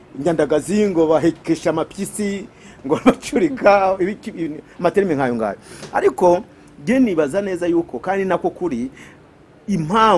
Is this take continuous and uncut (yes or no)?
yes